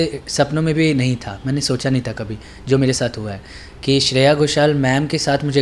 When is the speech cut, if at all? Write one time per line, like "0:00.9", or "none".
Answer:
none